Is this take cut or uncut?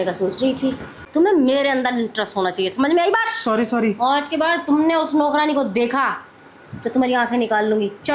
cut